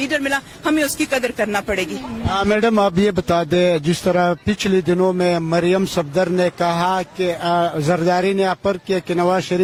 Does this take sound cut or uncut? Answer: uncut